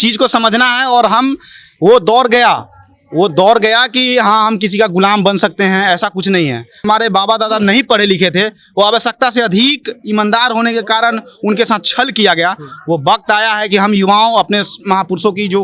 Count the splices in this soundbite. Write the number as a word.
one